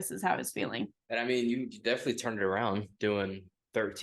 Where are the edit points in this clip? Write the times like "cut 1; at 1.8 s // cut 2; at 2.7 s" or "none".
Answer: cut 1; at 1.0 s